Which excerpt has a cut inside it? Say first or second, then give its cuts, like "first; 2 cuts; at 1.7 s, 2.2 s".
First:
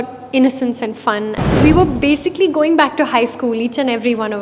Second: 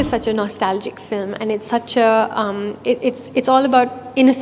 first; 1 cut; at 1.6 s